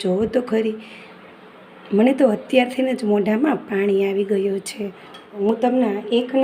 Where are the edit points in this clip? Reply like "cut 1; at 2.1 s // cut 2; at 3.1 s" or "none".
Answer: cut 1; at 5.4 s